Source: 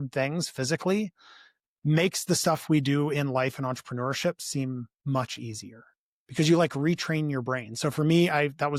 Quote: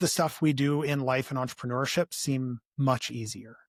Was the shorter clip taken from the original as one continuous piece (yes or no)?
yes